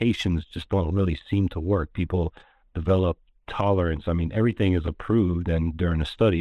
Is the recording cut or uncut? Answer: uncut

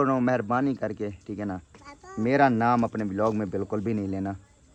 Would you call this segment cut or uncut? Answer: uncut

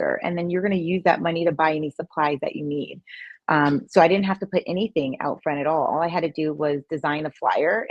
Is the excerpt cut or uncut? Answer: uncut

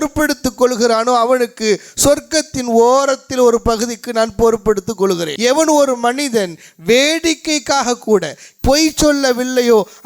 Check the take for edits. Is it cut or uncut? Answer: cut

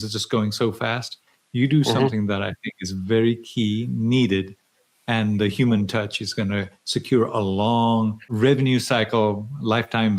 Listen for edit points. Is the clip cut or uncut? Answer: cut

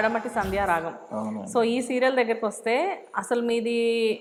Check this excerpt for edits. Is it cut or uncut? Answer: uncut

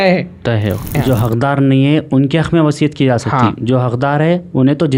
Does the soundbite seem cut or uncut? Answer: cut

